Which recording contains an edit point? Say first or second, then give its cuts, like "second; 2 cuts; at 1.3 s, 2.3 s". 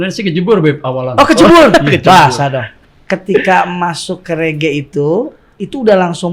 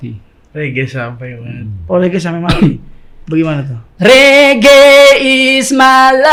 first; 1 cut; at 2.7 s